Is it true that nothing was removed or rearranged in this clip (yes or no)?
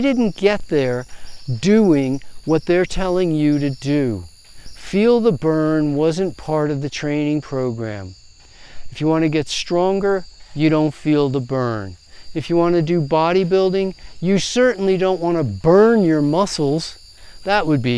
yes